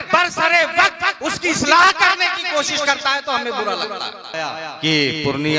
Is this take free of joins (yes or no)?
no